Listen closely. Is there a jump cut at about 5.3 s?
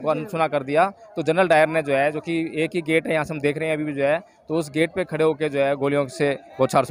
no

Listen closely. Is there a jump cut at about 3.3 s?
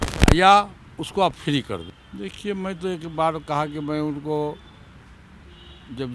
no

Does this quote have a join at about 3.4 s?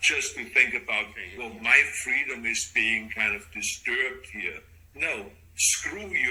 no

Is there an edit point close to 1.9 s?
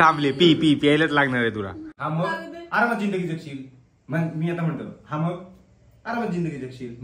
yes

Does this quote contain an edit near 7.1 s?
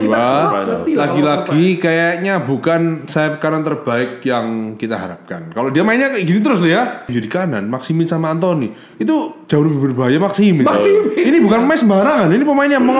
yes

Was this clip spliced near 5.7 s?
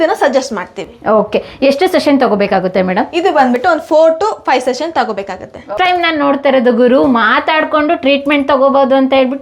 yes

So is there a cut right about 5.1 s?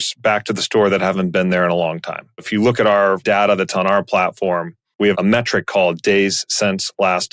yes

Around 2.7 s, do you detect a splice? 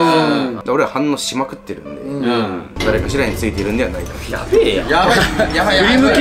yes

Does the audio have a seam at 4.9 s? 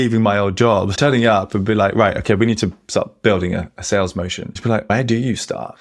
yes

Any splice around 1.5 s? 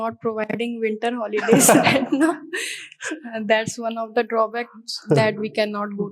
no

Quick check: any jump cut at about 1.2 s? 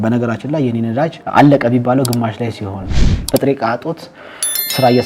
yes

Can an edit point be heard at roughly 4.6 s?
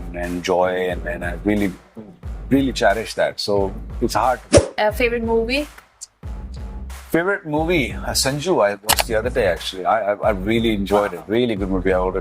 yes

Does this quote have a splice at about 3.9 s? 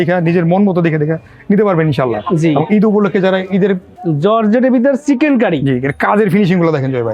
yes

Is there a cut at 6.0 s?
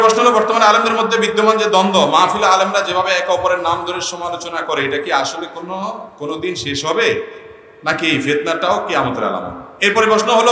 no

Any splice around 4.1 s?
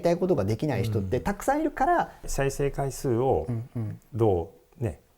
no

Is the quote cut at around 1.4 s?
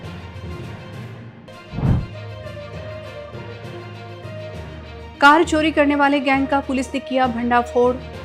yes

